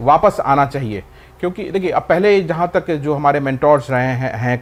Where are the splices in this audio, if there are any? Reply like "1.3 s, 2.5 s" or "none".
none